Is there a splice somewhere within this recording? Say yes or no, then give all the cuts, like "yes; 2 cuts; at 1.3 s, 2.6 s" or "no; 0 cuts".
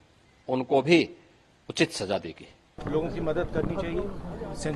yes; 1 cut; at 2.8 s